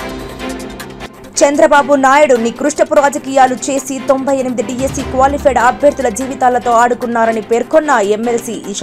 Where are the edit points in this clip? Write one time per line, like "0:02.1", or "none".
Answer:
0:01.0